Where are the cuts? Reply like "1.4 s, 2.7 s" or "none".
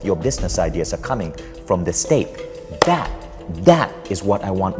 none

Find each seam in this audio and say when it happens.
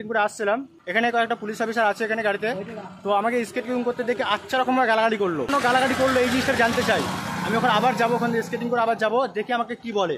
0.9 s, 5.5 s

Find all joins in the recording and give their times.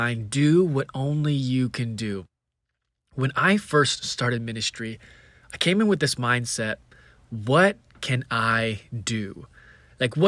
none

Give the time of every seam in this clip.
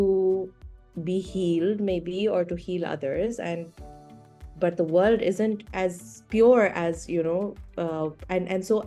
none

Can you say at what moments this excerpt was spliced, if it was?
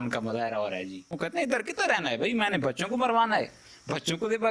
1.2 s

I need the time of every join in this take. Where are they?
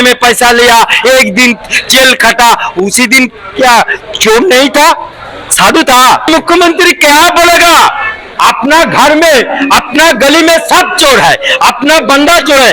6.3 s

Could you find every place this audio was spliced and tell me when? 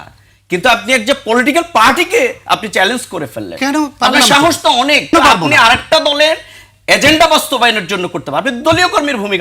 5.1 s

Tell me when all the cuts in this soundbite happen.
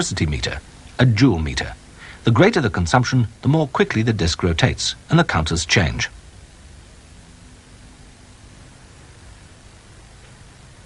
3.7 s

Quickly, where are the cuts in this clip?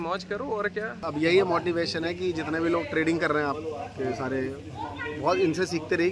1.0 s

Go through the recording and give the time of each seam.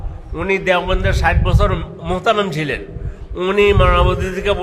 none

